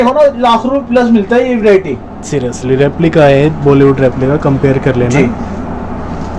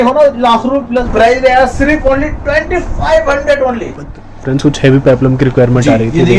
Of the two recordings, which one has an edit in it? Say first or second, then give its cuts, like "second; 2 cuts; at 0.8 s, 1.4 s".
second; 2 cuts; at 1.0 s, 4.0 s